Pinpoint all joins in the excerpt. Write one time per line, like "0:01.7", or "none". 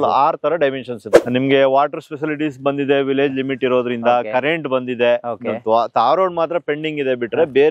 0:01.1